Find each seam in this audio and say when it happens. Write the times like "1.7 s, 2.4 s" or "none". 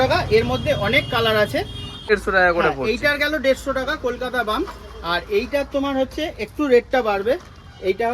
2.1 s